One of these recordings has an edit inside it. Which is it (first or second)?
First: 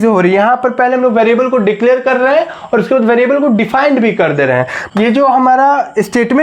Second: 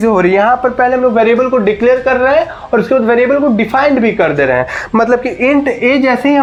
first